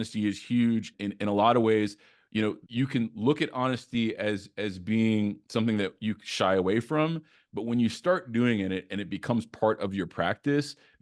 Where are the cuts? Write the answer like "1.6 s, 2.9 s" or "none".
0.9 s, 2.6 s